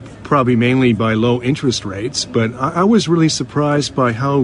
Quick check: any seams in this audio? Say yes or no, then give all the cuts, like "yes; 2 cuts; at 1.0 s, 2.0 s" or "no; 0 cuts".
yes; 1 cut; at 1.6 s